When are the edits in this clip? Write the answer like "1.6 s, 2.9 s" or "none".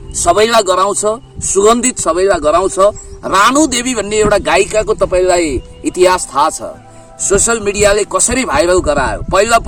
none